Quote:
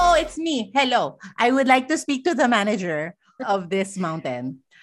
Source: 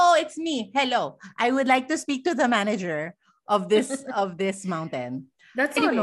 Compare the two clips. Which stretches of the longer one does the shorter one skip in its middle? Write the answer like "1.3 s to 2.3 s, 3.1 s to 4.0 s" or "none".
3.3 s to 4.0 s